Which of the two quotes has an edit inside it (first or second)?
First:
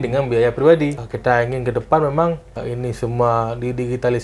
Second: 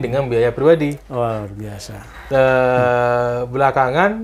first